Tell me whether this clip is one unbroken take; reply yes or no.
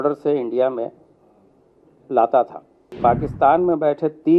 no